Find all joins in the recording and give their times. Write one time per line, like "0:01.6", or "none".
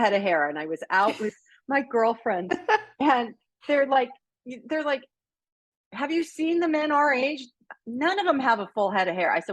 none